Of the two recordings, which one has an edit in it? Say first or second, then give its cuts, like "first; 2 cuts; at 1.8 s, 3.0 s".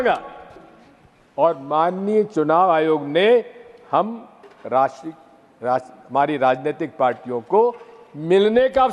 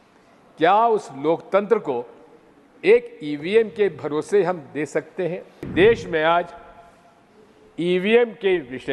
second; 1 cut; at 5.7 s